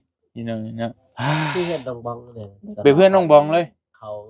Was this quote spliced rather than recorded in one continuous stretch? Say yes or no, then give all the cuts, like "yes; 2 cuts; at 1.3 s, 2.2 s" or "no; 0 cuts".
yes; 1 cut; at 1.1 s